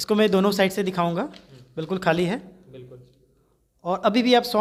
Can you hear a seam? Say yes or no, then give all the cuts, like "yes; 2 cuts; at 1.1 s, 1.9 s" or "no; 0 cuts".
no; 0 cuts